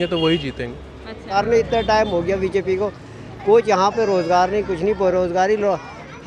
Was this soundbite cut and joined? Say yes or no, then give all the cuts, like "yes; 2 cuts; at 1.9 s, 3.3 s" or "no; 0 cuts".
yes; 1 cut; at 1.3 s